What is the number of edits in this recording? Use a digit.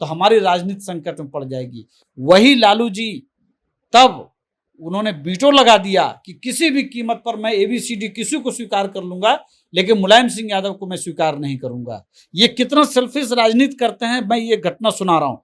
0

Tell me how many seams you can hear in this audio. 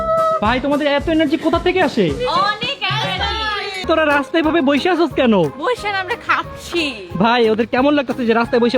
1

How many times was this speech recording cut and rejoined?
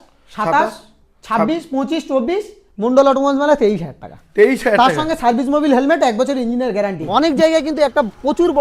1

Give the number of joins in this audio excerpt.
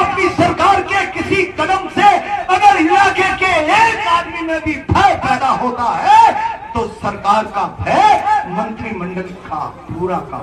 0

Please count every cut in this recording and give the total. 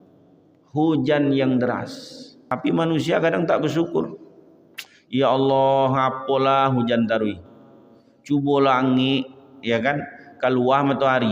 1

